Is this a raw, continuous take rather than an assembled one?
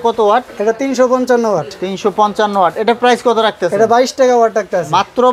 yes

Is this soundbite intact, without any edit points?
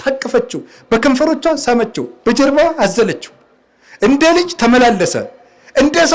yes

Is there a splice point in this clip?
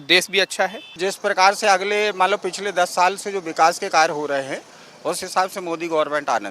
yes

